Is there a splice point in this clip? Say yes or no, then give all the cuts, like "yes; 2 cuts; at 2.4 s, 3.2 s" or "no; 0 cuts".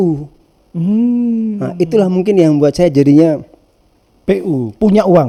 no; 0 cuts